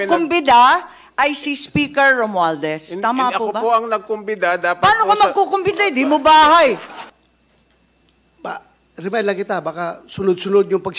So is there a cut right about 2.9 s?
no; 1 cut; at 6.9 s

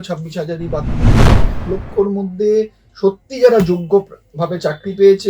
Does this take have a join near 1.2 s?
yes; 1 cut; at 1.2 s

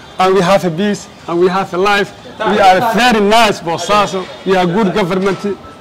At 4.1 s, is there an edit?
no; 0 cuts

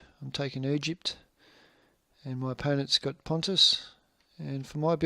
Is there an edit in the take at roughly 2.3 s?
yes; 1 cut; at 2.3 s

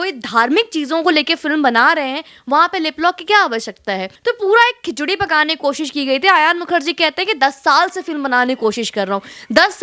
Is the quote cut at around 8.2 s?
no; 1 cut; at 4.1 s

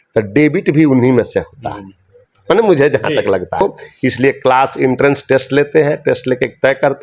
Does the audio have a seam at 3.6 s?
yes; 1 cut; at 3.6 s

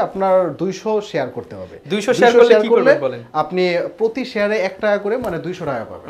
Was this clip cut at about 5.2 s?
no; 0 cuts

